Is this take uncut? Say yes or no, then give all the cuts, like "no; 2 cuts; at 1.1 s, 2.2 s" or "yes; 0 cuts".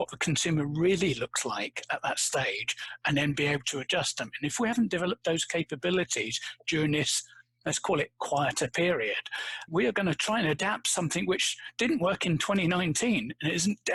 yes; 0 cuts